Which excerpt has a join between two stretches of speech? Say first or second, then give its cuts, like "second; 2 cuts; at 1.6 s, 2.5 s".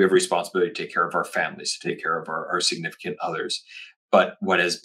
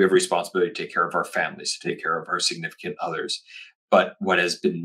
second; 1 cut; at 2.3 s